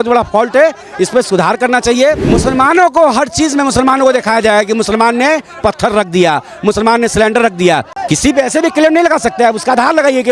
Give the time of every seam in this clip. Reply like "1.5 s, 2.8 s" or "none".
2.3 s, 7.9 s